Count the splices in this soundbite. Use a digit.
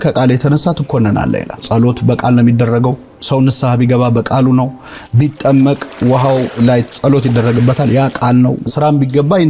3